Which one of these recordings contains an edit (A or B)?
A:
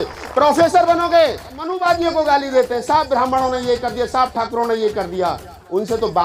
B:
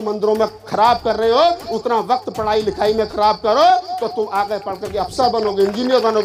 A